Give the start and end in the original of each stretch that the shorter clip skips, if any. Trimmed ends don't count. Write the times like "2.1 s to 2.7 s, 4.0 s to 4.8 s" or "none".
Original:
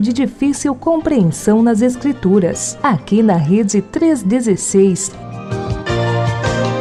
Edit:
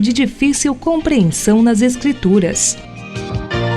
2.7 s to 5.1 s